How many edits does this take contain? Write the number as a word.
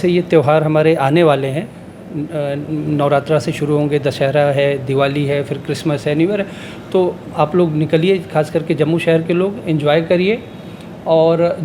zero